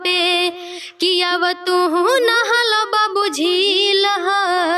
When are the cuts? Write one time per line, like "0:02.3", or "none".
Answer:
none